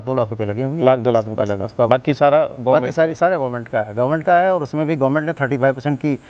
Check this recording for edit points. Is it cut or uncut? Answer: uncut